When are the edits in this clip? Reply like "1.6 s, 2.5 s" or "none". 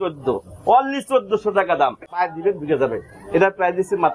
2.0 s